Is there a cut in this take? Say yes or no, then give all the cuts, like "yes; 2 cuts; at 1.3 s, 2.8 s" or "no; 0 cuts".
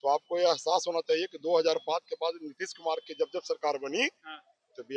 no; 0 cuts